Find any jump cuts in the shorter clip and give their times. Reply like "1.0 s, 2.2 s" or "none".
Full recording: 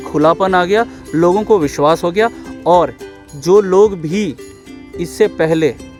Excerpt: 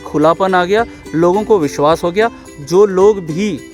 2.5 s